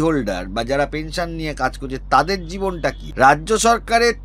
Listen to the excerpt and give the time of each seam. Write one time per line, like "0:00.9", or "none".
0:03.0